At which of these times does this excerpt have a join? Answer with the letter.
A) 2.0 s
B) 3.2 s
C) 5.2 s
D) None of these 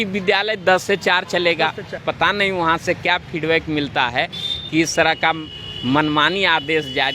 A